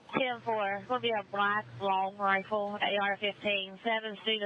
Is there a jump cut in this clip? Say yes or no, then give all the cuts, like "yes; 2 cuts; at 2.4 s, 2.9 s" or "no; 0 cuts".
no; 0 cuts